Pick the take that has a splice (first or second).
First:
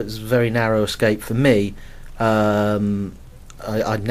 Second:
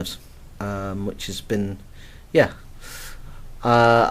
second